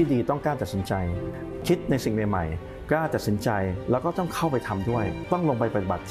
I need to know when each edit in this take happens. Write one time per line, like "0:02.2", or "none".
0:01.5
0:05.2